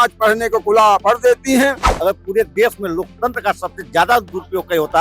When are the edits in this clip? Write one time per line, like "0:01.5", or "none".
0:01.9